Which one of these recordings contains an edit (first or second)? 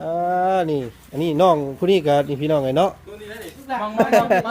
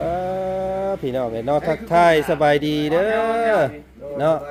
first